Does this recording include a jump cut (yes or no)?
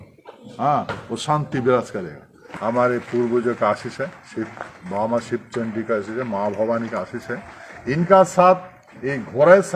yes